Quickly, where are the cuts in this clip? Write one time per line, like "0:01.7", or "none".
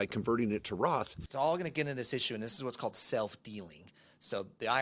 0:01.2